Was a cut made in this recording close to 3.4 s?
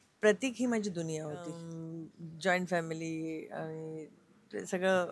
no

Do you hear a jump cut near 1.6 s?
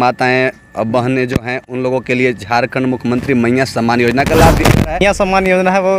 no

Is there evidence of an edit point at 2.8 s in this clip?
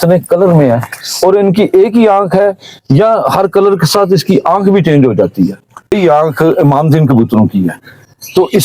no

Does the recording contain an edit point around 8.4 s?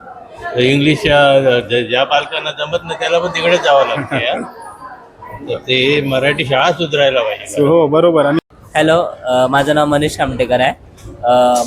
yes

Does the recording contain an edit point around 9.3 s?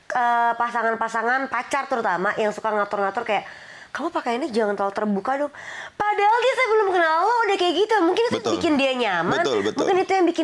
no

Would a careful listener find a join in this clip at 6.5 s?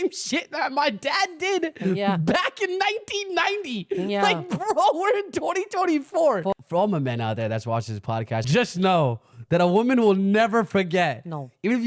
yes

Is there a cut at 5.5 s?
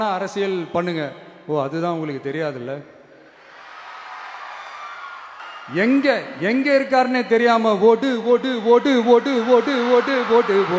yes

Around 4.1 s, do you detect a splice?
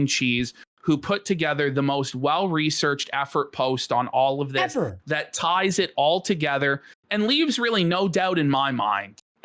no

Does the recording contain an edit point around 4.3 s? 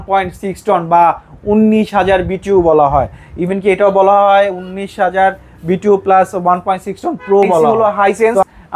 no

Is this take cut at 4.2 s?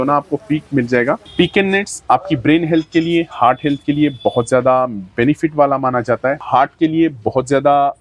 no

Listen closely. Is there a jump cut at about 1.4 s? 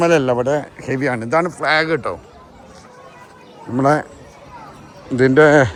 no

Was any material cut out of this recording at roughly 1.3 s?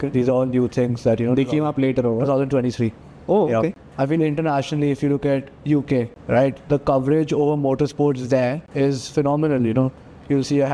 no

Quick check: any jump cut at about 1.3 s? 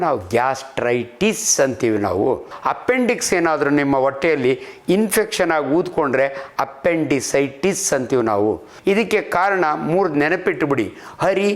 no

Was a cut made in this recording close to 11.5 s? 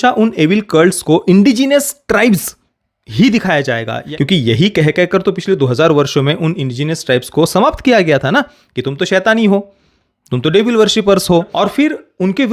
yes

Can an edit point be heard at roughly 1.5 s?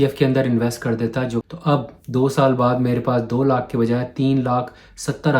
yes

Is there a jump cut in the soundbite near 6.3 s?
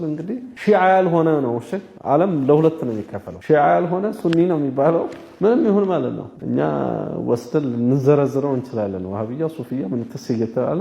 yes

